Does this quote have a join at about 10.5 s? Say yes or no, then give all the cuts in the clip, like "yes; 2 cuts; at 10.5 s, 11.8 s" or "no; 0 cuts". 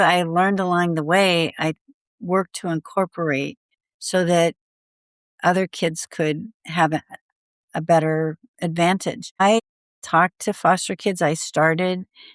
no; 0 cuts